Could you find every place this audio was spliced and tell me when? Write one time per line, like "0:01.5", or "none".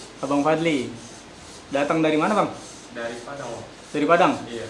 none